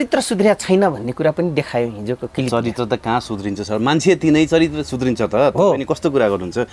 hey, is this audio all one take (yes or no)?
yes